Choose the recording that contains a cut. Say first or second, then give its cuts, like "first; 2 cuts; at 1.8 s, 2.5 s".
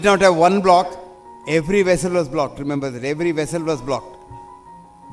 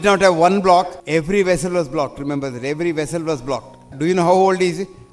second; 2 cuts; at 1.0 s, 3.9 s